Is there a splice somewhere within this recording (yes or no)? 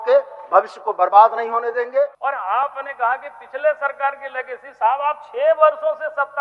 yes